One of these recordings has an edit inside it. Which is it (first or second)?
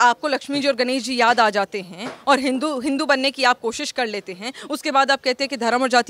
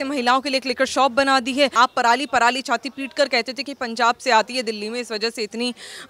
second